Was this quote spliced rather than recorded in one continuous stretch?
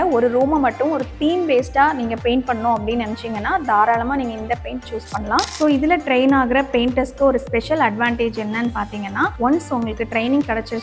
yes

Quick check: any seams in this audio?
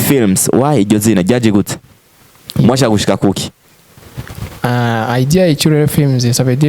no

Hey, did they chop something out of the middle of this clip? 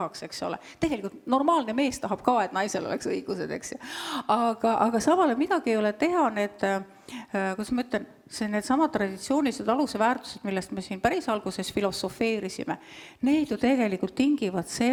no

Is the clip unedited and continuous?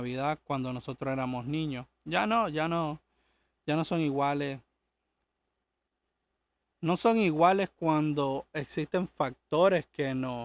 yes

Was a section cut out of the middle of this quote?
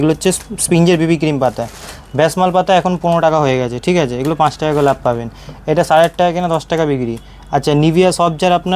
no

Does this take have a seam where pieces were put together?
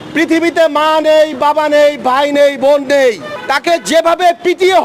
yes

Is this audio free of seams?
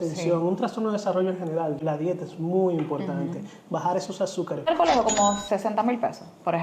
no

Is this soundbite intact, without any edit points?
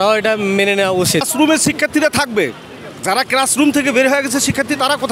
no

